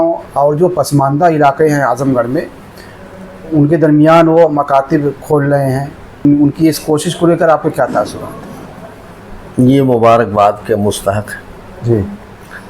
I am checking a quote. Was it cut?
yes; 1 cut; at 6.2 s

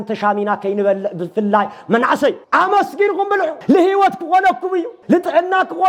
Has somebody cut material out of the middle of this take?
yes; 3 cuts; at 2.4 s, 3.6 s, 4.9 s

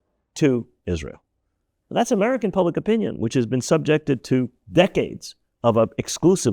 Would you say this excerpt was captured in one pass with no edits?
yes; 0 cuts

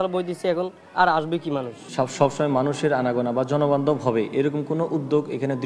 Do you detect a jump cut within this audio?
yes; 1 cut; at 1.8 s

